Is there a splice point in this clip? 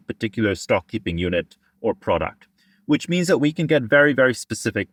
no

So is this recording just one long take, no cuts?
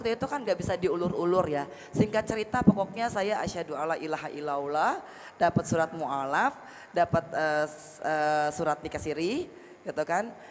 yes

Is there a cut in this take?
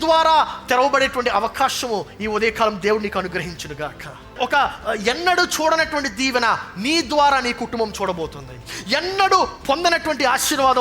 yes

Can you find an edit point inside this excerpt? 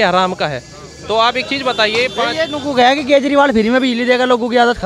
no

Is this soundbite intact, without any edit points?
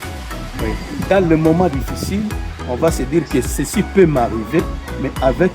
yes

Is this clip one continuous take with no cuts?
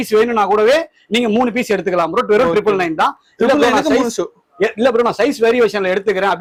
yes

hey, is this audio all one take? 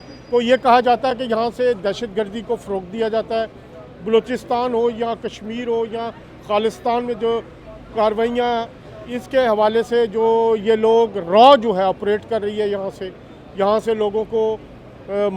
yes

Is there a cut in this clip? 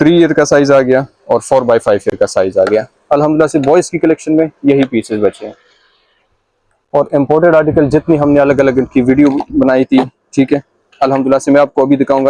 no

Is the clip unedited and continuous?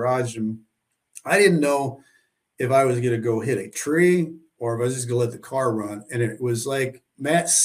yes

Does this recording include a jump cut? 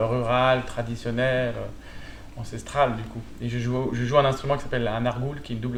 no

